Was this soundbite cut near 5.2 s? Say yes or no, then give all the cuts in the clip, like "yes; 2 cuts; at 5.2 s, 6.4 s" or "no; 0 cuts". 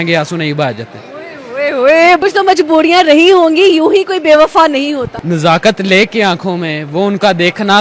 yes; 2 cuts; at 2.2 s, 5.2 s